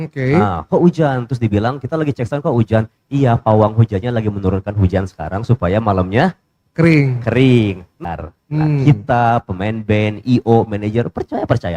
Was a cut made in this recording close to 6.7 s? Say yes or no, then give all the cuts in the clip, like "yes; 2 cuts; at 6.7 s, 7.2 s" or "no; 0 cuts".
no; 1 cut; at 8.0 s